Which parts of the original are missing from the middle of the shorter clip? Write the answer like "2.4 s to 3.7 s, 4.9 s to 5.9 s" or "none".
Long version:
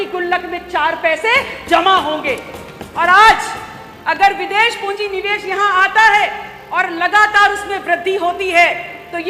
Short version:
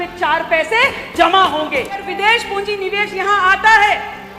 2.6 s to 4.4 s